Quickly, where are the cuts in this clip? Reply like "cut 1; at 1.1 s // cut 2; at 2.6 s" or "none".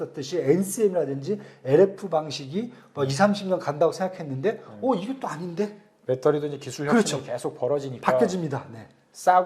none